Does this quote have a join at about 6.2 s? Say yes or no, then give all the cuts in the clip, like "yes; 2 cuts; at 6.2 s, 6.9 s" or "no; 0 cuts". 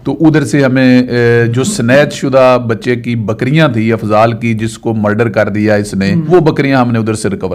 yes; 1 cut; at 6.2 s